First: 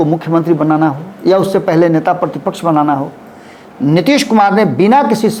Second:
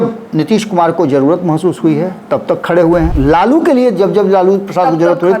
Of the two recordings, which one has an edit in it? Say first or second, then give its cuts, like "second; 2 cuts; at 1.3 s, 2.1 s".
second; 1 cut; at 3.1 s